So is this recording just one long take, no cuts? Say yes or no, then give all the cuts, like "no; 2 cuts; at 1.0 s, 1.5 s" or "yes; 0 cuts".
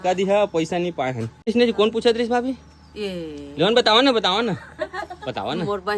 no; 1 cut; at 1.5 s